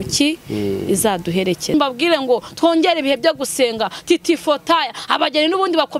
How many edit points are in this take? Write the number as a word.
one